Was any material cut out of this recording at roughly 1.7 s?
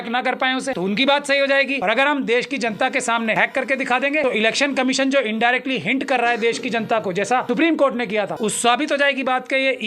yes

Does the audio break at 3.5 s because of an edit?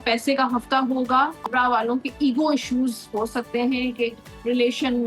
no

